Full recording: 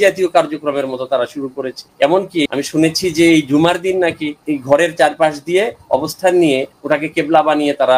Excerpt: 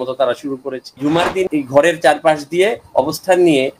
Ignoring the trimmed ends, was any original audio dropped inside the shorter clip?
yes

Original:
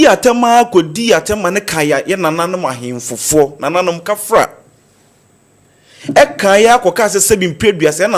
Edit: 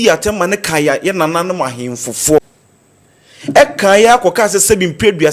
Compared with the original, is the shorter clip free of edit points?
no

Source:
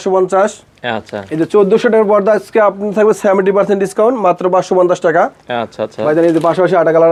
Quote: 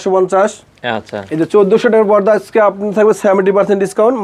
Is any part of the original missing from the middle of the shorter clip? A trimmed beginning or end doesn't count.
no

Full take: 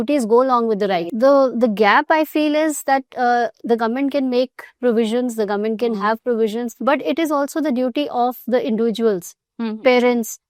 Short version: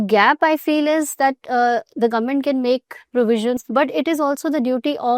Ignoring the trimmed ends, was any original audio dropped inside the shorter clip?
yes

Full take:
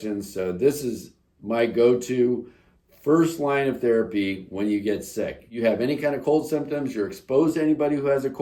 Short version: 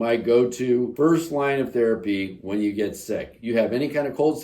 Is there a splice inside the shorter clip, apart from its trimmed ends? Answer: yes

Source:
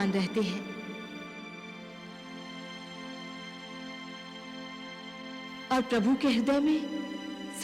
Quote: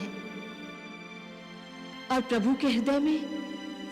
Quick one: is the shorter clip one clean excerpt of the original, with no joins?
no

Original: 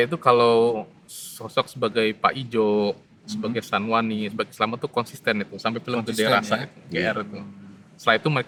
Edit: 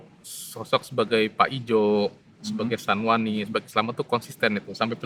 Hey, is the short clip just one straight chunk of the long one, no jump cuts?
yes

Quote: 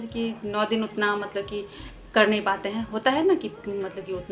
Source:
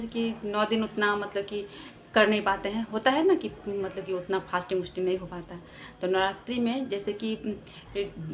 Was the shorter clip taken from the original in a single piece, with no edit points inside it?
yes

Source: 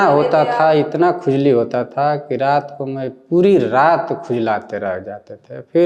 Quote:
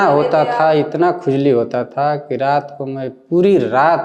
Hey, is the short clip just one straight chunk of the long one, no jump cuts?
yes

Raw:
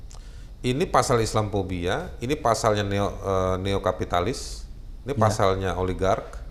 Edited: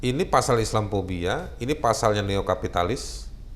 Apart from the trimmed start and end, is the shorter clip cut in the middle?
yes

